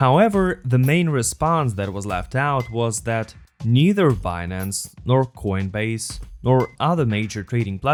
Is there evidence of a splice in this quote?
no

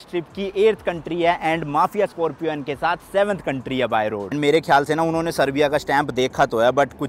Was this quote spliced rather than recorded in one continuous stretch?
no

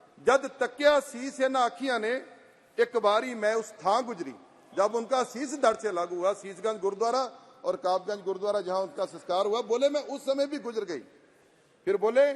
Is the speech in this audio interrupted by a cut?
no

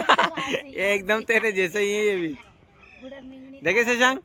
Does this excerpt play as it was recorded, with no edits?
yes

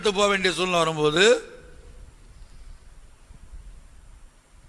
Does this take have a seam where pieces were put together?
no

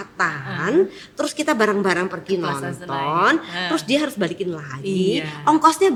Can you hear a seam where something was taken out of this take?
no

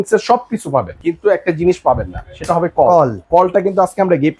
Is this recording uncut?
no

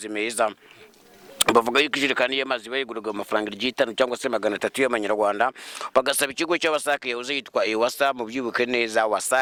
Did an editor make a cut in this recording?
no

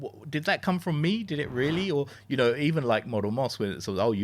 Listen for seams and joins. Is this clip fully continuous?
yes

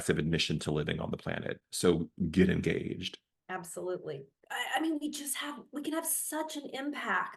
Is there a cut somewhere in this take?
yes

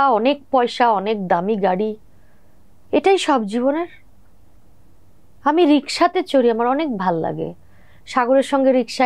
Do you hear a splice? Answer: no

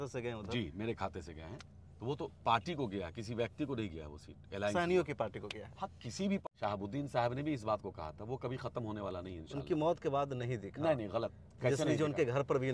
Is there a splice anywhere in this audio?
yes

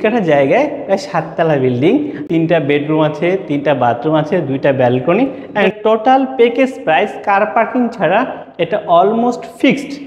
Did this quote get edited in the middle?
yes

